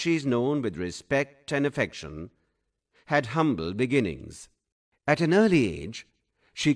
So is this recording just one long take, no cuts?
yes; 0 cuts

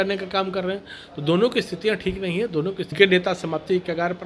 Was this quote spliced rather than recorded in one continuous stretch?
yes; 1 cut; at 2.9 s

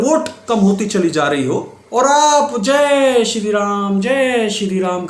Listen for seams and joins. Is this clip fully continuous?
no; 1 cut; at 1.8 s

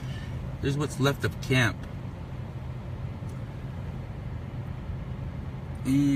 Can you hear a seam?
yes; 1 cut; at 1.4 s

